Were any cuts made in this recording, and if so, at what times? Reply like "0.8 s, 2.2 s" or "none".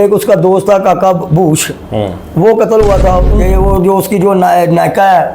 3.3 s